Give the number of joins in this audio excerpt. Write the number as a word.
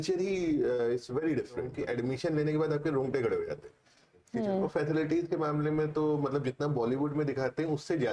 two